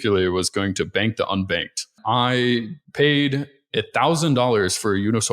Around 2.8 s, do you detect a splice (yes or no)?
yes